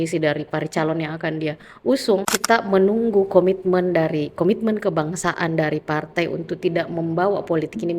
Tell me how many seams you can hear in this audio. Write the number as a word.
one